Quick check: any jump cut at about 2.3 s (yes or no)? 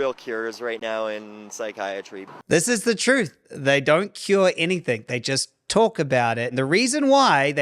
yes